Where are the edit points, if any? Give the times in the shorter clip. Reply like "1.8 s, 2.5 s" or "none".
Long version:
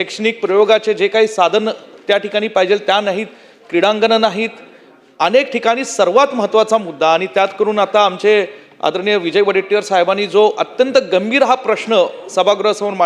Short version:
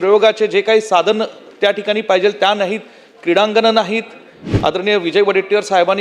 4.4 s